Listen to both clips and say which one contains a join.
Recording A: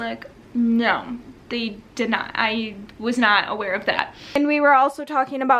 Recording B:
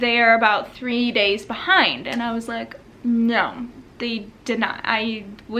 A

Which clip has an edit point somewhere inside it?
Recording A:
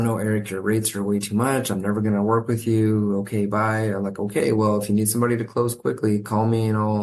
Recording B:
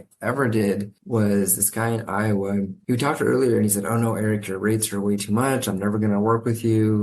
B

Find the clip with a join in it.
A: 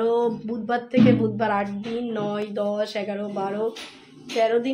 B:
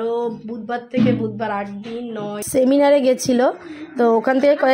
B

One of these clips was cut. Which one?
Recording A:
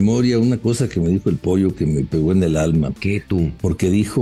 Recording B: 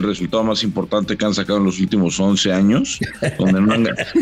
A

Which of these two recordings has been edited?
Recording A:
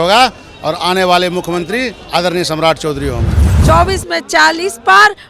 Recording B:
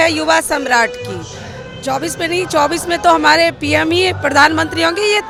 A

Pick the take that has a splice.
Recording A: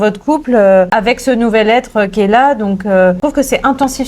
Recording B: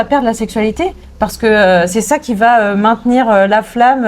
A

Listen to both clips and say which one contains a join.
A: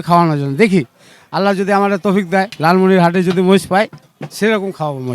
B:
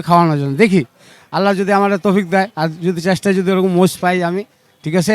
A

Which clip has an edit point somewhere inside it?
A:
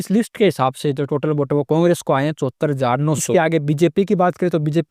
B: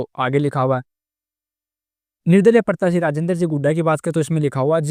A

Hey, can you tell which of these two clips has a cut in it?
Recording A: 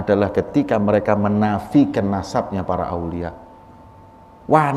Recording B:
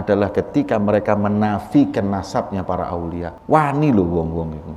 B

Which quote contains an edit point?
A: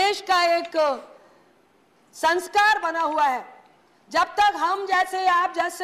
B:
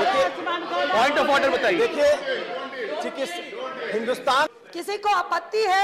B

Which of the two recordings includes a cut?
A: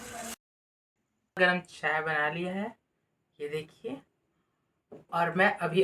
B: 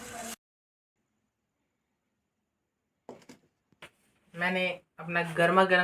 A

